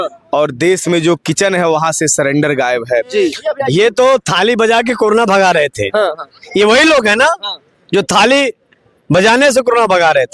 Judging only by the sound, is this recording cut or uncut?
cut